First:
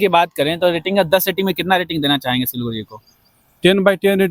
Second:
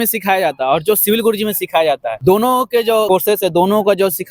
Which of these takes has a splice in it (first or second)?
second